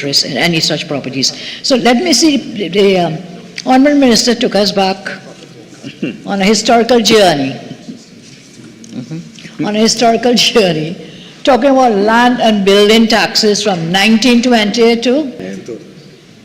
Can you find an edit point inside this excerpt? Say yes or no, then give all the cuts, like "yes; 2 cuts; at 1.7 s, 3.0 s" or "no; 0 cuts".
yes; 1 cut; at 15.4 s